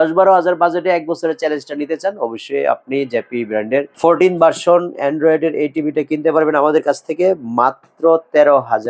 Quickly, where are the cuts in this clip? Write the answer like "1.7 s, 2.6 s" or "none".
none